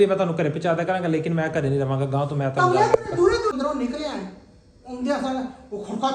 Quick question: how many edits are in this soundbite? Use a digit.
1